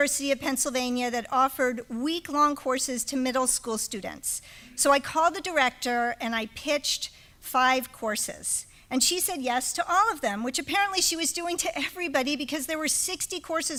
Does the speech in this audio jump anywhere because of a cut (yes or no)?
no